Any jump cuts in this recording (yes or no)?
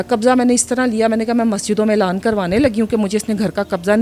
no